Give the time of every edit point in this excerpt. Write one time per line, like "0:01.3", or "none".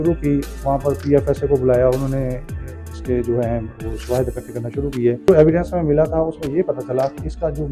0:05.3